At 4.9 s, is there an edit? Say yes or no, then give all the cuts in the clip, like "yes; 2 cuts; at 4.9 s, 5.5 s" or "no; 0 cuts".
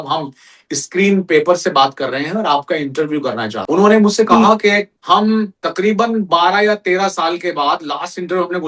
yes; 3 cuts; at 3.5 s, 4.9 s, 5.6 s